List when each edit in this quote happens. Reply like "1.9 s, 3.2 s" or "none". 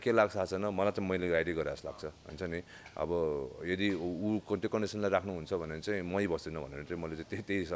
none